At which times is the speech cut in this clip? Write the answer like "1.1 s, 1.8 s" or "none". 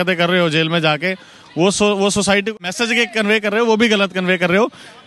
2.5 s